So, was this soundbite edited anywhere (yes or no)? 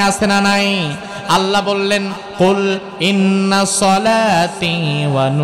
yes